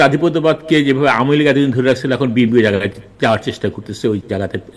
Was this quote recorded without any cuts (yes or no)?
yes